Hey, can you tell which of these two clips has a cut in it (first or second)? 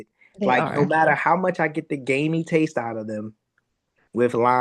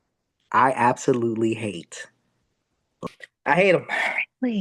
second